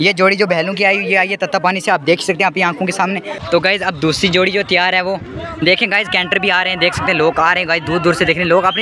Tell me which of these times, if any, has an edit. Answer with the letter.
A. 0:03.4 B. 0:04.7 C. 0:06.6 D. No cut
A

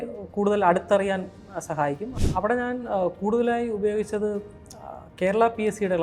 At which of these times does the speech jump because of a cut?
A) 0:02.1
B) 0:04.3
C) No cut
A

